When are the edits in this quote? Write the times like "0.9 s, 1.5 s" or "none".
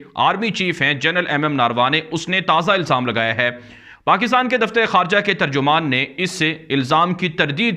none